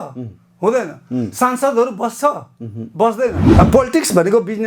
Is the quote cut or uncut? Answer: cut